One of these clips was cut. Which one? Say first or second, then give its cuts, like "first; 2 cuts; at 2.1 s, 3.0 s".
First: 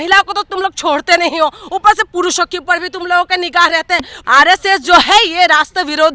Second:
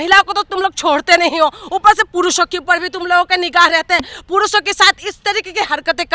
first; 1 cut; at 4.1 s